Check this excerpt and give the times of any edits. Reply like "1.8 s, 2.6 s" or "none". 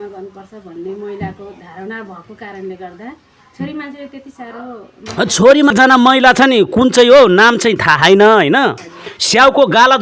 5.7 s